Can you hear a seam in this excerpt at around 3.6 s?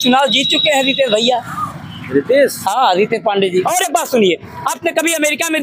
yes; 1 cut; at 3.6 s

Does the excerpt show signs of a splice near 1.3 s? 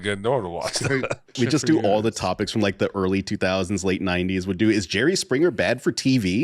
yes; 1 cut; at 1.3 s

